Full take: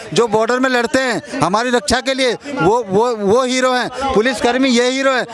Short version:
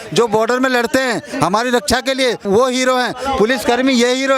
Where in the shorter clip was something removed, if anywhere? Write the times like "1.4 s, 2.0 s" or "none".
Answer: 2.4 s